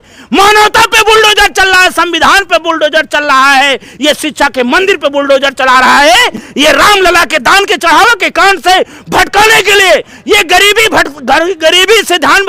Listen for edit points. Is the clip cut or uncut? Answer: uncut